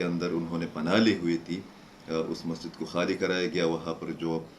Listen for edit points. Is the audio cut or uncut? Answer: uncut